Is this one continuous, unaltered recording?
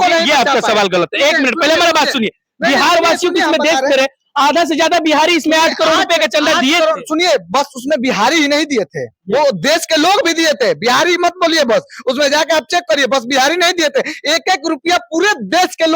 yes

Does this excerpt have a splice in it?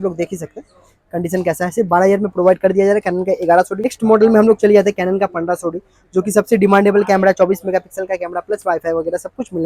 yes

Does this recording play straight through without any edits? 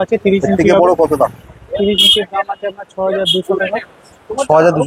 yes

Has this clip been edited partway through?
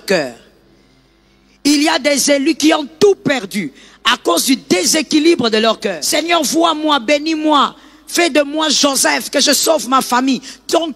yes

